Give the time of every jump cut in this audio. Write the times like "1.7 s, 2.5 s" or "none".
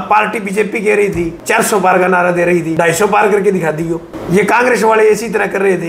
1.4 s, 2.7 s, 4.1 s